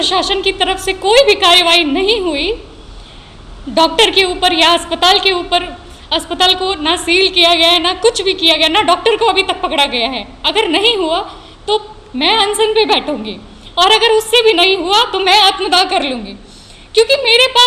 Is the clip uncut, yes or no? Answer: yes